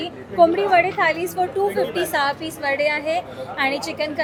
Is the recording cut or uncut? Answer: uncut